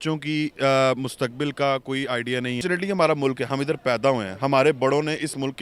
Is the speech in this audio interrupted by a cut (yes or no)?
yes